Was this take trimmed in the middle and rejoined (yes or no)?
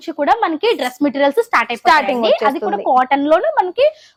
no